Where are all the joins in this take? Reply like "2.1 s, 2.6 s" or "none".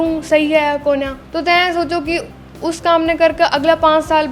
1.2 s